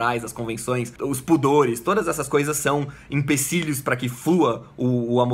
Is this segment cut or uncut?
cut